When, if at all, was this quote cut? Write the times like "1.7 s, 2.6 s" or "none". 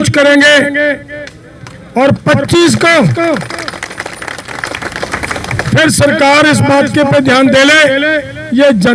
none